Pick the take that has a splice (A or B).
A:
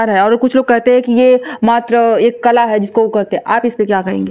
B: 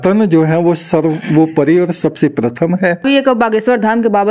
B